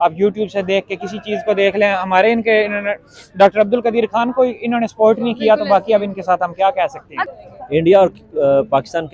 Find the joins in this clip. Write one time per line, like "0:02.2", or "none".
0:07.2